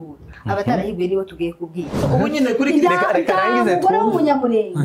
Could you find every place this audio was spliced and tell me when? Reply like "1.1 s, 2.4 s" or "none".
2.0 s